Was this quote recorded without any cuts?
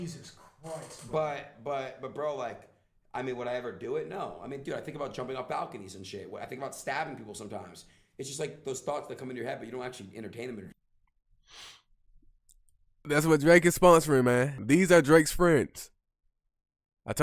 no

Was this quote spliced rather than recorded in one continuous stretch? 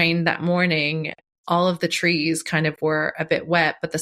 yes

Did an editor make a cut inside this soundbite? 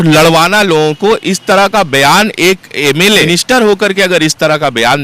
yes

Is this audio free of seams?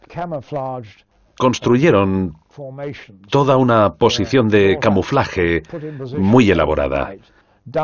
yes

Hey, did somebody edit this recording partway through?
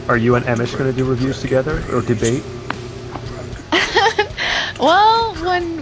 no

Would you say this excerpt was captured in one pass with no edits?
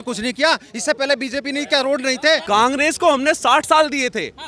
no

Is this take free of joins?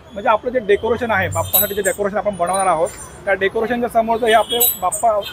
yes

